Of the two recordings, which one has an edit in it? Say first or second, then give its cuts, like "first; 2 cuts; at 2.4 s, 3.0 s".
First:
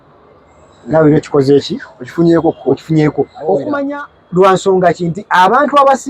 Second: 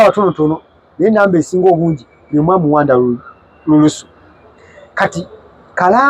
first; 1 cut; at 3.8 s